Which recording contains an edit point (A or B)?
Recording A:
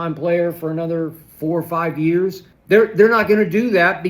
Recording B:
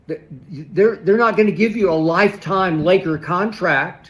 A